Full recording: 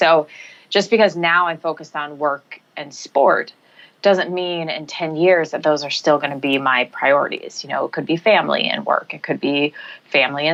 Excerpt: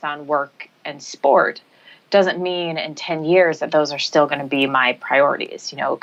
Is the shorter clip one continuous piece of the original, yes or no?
yes